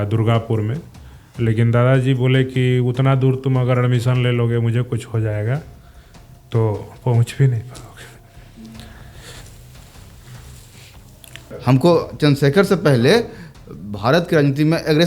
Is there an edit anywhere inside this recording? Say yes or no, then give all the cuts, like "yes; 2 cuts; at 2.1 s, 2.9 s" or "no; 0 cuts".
yes; 1 cut; at 11.5 s